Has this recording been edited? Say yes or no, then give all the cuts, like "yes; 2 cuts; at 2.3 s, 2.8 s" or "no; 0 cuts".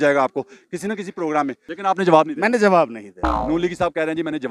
yes; 1 cut; at 1.7 s